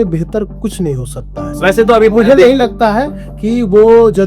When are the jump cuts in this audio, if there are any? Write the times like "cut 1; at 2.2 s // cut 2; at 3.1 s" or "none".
cut 1; at 1.6 s